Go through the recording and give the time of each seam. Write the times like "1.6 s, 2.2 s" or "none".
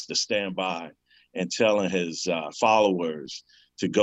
2.5 s